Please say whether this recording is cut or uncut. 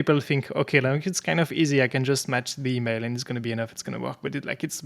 uncut